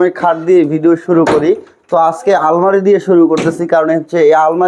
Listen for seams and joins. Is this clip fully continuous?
yes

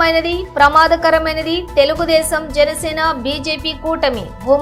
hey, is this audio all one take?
yes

